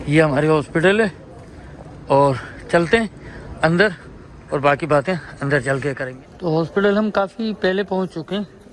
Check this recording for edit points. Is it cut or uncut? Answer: cut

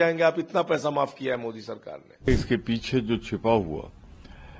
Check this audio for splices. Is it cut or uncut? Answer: cut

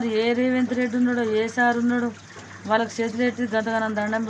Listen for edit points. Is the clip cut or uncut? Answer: uncut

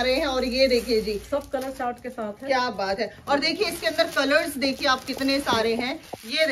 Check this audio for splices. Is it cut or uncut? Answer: uncut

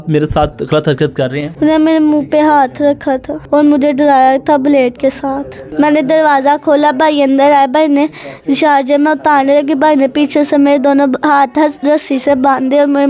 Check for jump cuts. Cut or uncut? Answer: cut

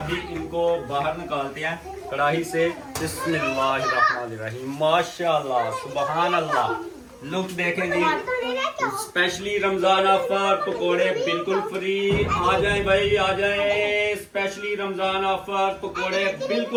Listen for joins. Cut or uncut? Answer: uncut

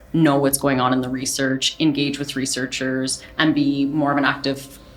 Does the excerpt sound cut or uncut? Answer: uncut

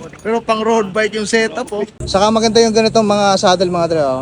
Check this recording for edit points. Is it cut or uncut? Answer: cut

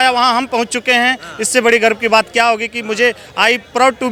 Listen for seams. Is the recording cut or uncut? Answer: uncut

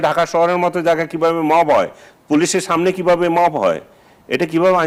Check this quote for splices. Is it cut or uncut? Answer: uncut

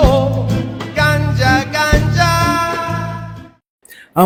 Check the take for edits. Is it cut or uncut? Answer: uncut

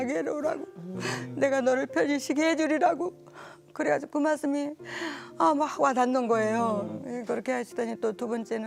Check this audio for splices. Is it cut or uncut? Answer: uncut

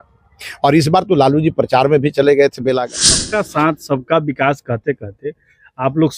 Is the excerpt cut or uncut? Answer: cut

